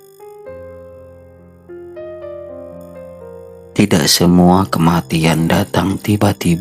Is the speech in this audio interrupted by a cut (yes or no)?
no